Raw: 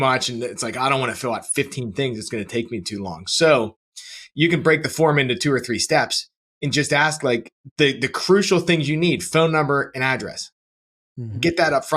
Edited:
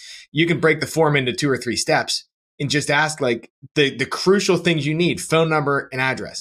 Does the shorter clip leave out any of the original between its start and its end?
no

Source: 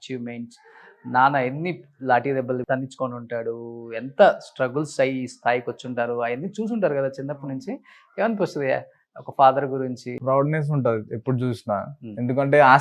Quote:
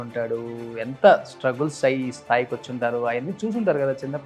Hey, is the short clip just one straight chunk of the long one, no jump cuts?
yes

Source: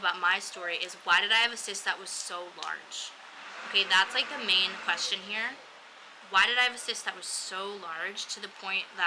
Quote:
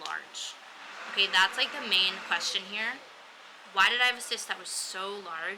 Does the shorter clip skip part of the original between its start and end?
no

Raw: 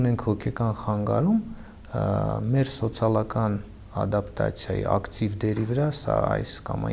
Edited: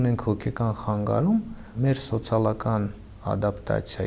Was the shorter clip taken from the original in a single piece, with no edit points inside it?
no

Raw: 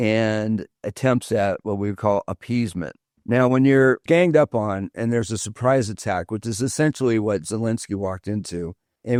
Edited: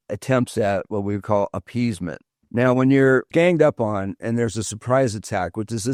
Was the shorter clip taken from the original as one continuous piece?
yes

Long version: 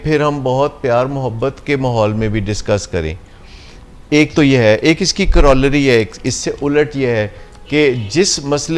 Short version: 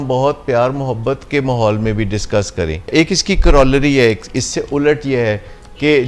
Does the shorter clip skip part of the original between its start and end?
yes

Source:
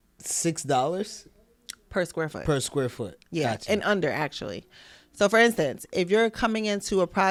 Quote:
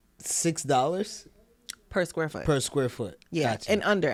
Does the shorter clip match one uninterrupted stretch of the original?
yes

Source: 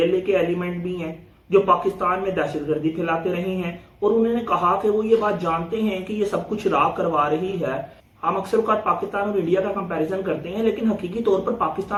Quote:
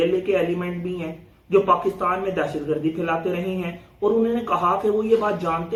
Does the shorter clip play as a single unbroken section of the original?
yes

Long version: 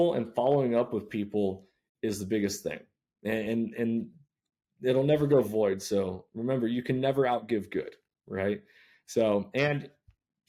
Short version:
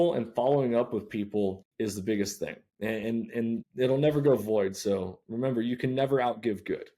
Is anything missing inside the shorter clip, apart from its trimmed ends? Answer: yes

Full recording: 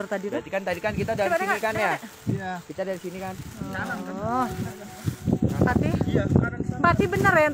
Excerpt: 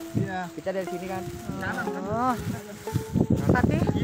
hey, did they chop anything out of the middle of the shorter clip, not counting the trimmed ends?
no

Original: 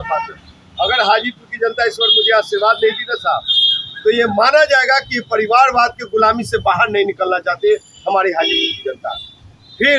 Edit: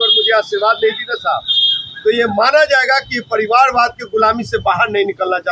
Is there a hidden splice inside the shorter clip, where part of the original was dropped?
no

